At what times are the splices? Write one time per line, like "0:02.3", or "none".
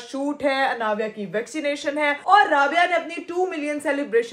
none